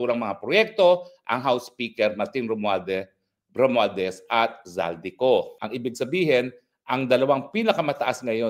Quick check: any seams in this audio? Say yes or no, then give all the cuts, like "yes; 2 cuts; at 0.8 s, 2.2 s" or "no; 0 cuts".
yes; 1 cut; at 5.6 s